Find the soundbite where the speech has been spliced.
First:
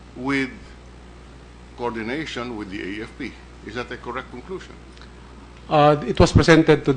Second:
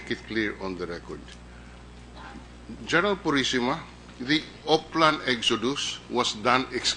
first; 1 cut; at 2.5 s

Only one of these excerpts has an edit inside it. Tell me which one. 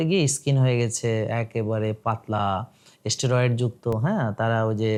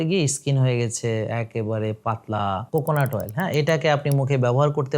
second; 1 cut; at 2.6 s

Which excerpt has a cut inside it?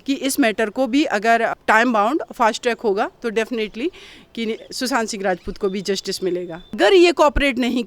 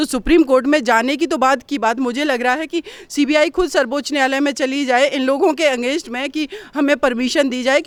first; 1 cut; at 6.8 s

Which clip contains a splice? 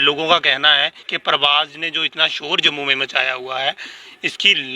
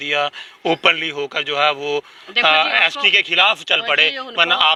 first; 1 cut; at 1.0 s

